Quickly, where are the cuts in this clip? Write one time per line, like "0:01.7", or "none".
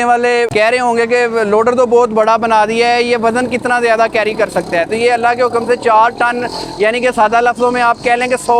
none